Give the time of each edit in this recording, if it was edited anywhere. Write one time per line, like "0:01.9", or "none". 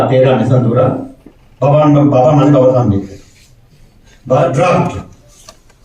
0:04.4